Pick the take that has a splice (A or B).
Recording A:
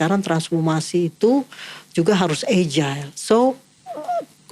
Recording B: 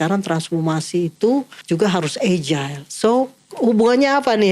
B